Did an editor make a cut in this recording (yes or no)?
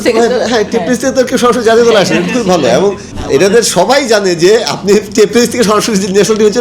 yes